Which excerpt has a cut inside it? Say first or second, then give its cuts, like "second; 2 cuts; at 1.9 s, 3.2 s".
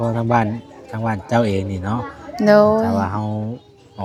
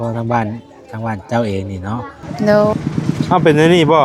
second; 1 cut; at 2.7 s